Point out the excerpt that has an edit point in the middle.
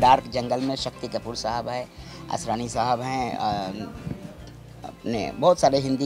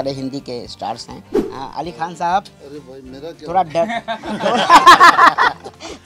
second; 1 cut; at 1.3 s

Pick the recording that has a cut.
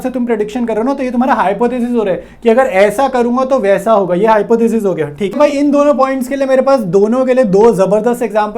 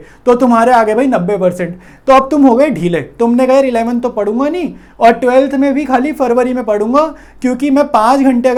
first; 1 cut; at 5.3 s

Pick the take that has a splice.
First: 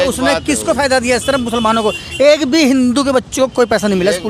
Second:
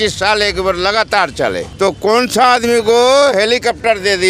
second; 1 cut; at 1.7 s

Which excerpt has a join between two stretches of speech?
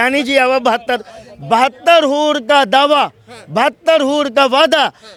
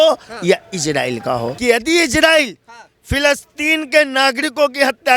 second; 1 cut; at 1.5 s

